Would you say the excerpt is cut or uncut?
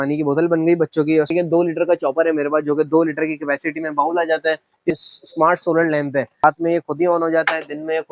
cut